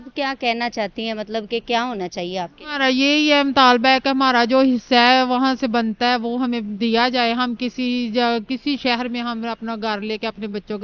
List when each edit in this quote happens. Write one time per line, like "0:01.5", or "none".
none